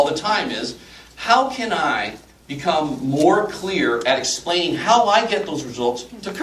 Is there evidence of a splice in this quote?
no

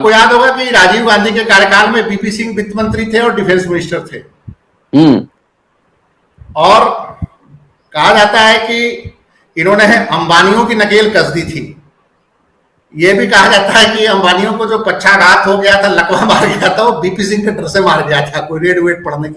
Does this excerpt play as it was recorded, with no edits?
yes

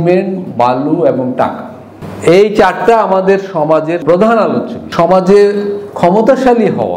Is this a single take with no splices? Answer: no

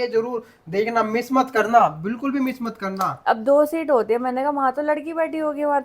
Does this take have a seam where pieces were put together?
yes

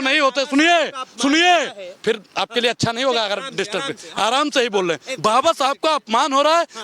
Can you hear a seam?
no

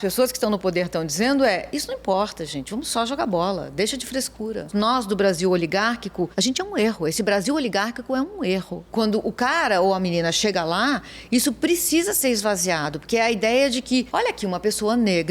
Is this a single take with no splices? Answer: no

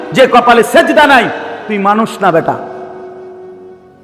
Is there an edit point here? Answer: no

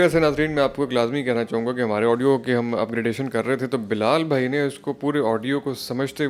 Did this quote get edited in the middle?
no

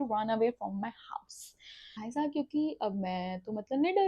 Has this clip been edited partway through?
yes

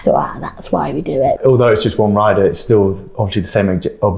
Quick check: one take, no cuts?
no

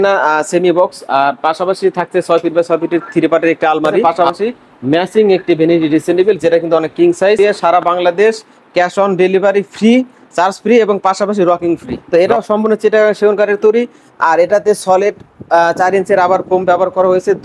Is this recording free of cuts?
no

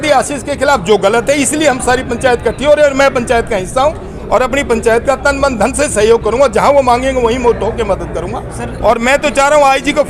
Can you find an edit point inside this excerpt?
yes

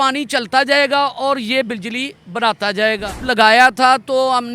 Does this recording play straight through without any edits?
no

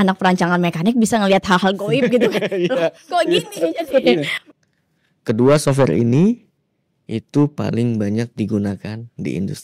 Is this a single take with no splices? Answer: no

